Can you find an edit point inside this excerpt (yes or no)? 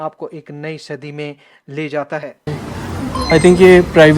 yes